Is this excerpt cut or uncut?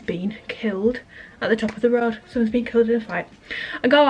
uncut